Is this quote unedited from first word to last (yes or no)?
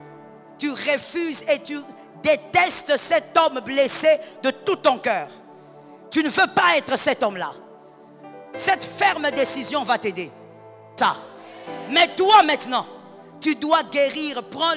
no